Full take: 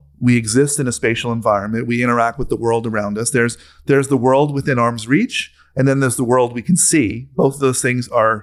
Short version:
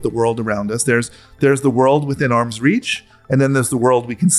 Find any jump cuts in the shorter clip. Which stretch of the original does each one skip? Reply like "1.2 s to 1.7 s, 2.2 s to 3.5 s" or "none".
none